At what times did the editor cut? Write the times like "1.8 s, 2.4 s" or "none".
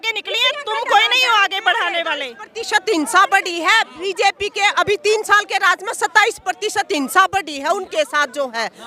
none